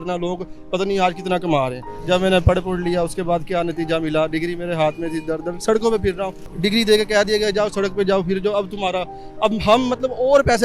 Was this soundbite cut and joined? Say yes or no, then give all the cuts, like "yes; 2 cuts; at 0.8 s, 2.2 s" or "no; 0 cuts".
yes; 2 cuts; at 1.9 s, 6.4 s